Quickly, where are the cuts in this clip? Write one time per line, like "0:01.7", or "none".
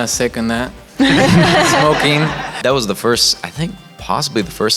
0:02.5